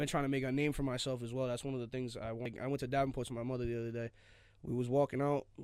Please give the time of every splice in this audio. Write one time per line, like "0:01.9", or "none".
0:02.5